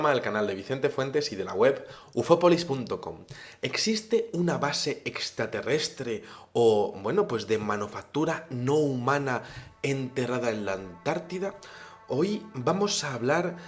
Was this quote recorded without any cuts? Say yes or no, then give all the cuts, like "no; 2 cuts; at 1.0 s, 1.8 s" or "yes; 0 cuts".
yes; 0 cuts